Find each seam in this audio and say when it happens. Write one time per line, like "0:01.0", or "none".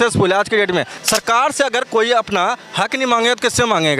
0:00.9